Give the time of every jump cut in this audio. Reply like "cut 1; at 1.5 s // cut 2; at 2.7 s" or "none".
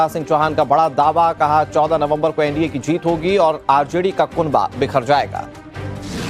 none